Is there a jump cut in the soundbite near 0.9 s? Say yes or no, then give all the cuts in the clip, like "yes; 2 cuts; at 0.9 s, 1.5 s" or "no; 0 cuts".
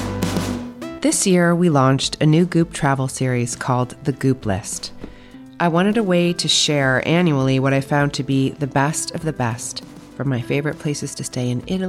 yes; 1 cut; at 0.9 s